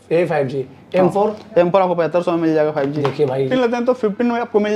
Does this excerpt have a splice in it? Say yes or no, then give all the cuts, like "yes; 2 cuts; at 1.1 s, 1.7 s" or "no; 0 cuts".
yes; 1 cut; at 3.5 s